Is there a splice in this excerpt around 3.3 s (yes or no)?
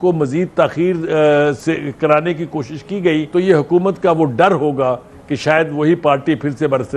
yes